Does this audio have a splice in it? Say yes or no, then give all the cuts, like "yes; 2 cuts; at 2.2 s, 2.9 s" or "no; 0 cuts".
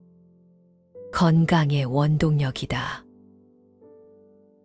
yes; 1 cut; at 3.0 s